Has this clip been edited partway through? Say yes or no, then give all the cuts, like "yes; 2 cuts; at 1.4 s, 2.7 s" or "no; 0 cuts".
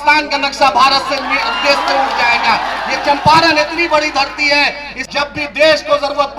yes; 1 cut; at 4.9 s